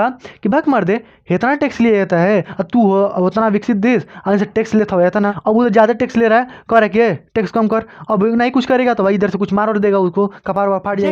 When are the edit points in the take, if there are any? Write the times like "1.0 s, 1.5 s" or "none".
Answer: 2.5 s, 5.4 s